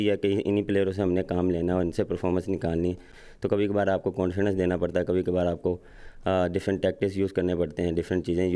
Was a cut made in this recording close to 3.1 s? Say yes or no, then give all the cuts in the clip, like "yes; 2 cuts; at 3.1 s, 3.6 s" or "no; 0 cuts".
no; 0 cuts